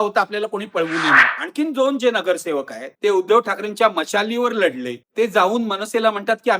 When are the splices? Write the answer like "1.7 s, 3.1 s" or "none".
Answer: 1.3 s